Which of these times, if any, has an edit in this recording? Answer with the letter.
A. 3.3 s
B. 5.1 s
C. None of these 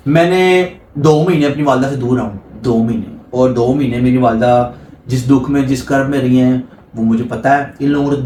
C